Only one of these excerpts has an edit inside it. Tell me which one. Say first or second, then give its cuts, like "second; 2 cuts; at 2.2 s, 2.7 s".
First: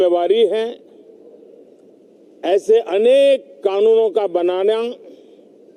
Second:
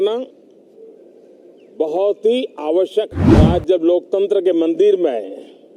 second; 1 cut; at 3.3 s